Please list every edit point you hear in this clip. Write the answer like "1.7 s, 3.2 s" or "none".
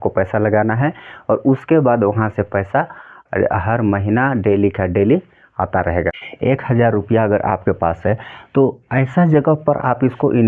6.2 s